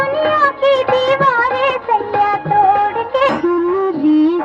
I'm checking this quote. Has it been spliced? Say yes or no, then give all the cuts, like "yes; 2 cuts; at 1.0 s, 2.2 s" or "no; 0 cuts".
yes; 1 cut; at 3.3 s